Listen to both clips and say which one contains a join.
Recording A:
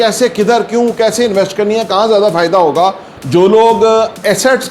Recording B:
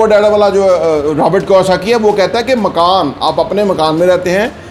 A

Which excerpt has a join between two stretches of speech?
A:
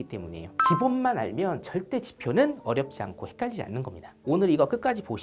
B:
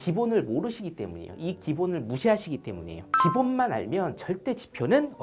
A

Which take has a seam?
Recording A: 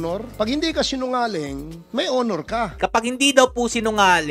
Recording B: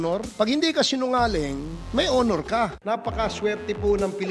B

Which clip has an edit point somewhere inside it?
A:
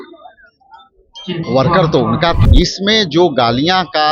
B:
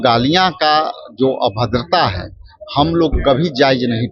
A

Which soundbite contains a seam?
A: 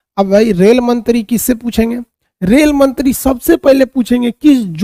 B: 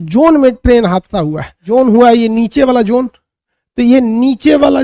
B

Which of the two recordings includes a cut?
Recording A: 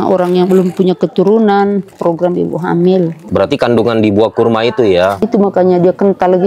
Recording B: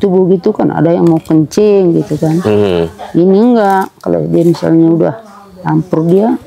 A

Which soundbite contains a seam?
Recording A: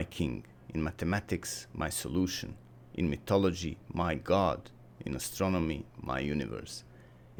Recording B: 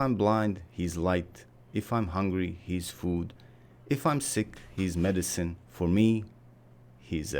B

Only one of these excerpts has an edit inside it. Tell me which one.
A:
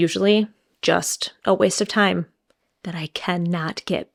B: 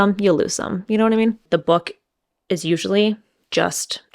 B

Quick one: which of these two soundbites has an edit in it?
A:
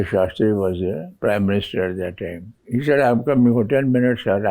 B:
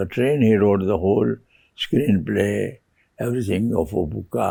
A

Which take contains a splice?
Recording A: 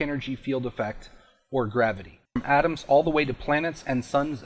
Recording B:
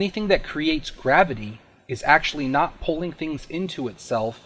A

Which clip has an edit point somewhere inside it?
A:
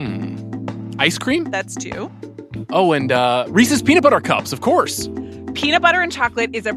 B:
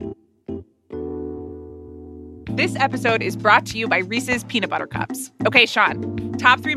B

